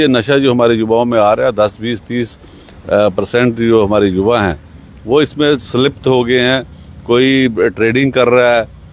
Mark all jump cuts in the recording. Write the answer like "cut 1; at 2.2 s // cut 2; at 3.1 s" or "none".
none